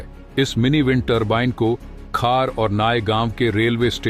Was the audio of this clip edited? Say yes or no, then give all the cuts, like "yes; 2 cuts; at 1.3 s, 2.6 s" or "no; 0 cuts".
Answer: no; 0 cuts